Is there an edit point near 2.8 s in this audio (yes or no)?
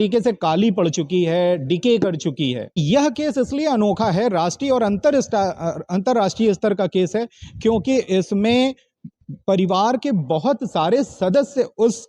yes